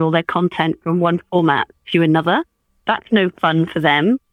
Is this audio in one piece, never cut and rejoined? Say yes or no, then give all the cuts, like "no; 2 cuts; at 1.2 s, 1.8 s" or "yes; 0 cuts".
no; 1 cut; at 2.7 s